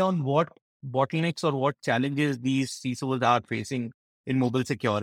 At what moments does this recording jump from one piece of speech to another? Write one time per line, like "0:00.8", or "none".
none